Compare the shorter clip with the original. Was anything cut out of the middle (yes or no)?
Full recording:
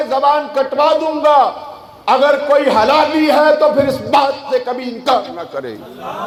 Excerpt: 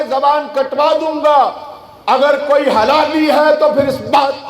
no